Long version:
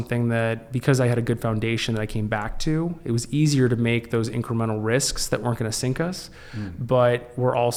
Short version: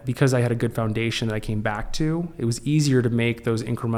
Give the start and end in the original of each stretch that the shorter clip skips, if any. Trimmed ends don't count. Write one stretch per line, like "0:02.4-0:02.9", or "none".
none